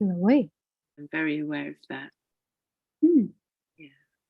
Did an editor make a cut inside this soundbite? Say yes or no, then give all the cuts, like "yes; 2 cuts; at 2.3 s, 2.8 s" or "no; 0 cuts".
yes; 1 cut; at 0.9 s